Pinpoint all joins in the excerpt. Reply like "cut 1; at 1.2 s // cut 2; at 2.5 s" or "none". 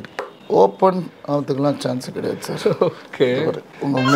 none